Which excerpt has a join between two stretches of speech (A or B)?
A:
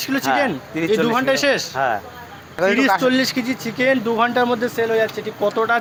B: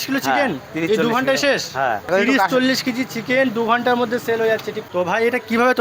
B